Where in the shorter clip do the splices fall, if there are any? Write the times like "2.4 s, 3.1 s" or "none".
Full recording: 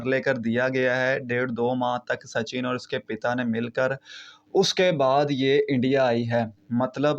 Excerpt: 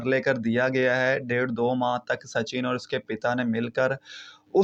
none